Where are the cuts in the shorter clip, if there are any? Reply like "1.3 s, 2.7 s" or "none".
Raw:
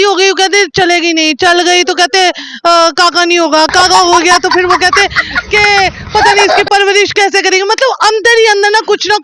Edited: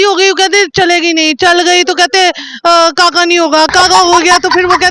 none